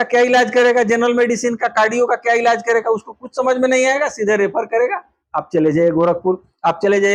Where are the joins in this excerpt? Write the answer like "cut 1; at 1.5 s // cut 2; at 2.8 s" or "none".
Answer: none